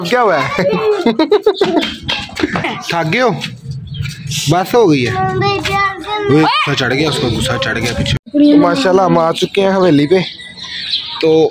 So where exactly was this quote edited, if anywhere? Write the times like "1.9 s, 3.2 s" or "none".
2.7 s, 8.1 s